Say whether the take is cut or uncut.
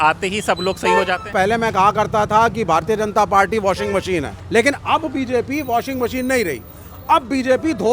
cut